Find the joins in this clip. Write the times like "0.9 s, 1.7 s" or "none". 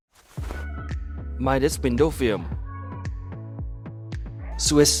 none

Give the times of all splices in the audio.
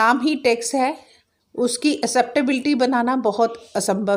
none

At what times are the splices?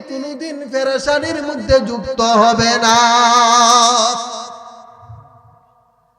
none

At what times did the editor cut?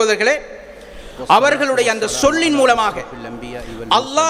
none

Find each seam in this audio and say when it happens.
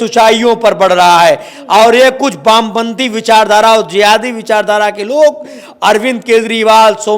none

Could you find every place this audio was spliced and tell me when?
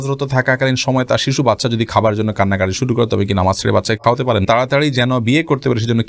4.4 s

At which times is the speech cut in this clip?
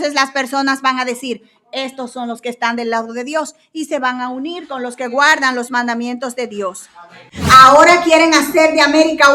7.1 s

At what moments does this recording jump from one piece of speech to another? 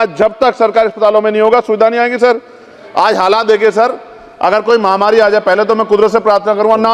2.8 s

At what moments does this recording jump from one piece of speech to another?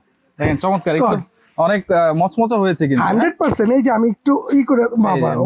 none

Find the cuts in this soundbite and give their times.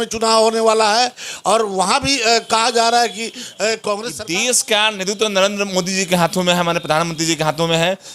4.1 s

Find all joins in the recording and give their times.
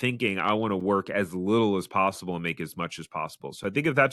none

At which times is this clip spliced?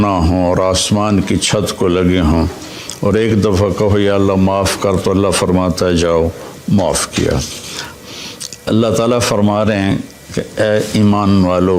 8.0 s

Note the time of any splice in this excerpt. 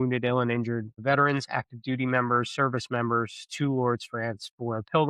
0.9 s

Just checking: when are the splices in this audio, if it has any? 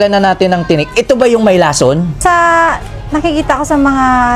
2.2 s

